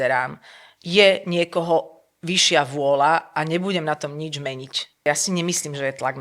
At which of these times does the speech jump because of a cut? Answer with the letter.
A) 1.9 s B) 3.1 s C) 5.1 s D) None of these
C